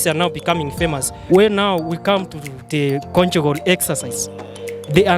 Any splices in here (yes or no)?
yes